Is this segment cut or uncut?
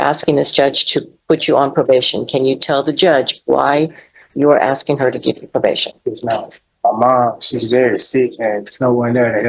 cut